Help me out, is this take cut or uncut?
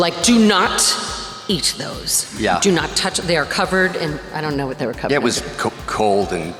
uncut